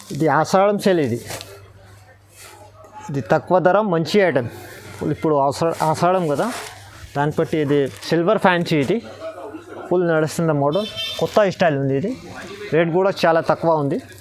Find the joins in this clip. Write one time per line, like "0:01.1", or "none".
0:08.0